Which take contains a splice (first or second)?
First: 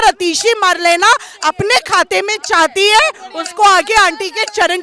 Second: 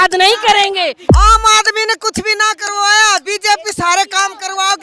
second